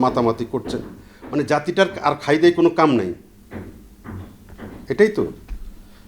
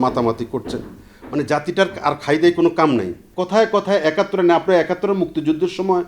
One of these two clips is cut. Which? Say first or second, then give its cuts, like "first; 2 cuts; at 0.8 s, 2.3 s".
second; 1 cut; at 3.3 s